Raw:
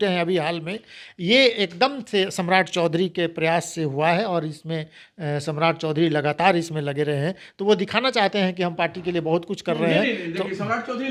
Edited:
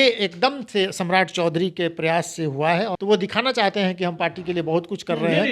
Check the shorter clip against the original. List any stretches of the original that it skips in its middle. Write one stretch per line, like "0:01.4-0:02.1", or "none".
0:04.3-0:07.5